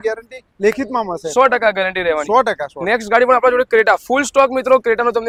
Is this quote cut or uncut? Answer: uncut